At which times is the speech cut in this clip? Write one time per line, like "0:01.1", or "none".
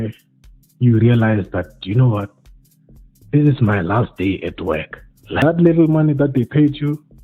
0:05.4

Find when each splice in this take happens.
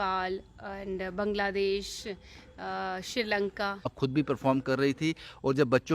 0:03.9

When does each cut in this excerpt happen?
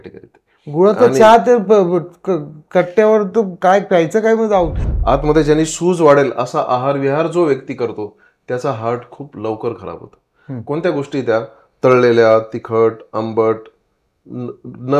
0:04.9

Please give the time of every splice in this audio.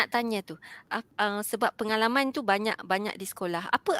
0:00.9

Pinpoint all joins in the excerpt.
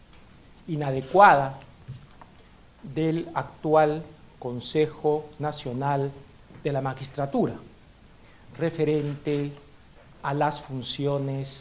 0:01.0

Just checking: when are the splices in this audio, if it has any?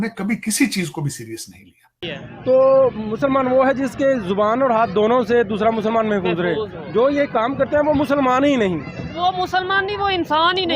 0:01.9

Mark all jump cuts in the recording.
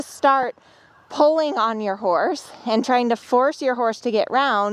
none

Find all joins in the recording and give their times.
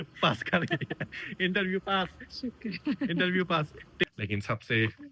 0:04.1

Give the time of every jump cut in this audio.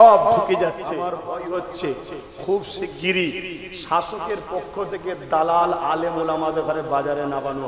0:01.1

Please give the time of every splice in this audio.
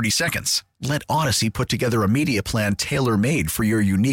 none

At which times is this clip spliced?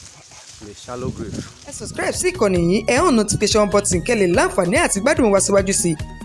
0:01.9

